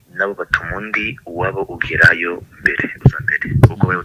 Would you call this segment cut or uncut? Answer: uncut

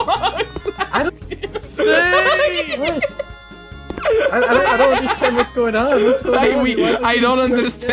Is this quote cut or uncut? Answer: cut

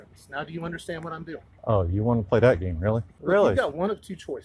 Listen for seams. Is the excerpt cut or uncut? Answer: cut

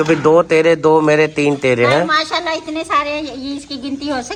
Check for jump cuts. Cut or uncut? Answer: uncut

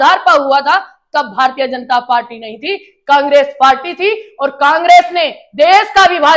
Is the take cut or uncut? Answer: uncut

